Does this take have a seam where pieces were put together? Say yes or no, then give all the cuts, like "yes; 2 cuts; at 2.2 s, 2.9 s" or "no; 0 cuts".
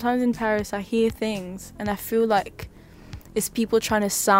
no; 0 cuts